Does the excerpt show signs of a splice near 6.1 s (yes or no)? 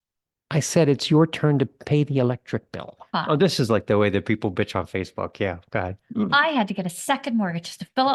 no